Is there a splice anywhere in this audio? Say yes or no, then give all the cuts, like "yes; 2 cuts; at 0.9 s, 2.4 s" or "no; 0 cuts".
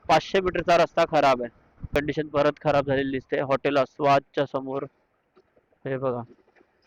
yes; 1 cut; at 2.0 s